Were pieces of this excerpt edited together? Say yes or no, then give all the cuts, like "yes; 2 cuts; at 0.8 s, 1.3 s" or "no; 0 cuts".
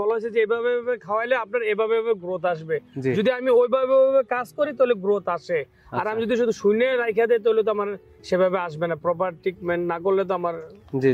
no; 0 cuts